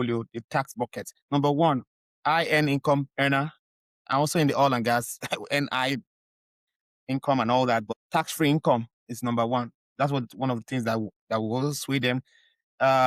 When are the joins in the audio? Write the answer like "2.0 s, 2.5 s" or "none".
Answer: 8.0 s